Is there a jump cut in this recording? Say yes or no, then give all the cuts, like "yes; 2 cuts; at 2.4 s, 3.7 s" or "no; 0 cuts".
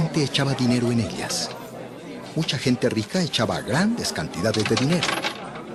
no; 0 cuts